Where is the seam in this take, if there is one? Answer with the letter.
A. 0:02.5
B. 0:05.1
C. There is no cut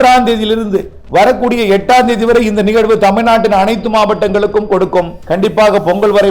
B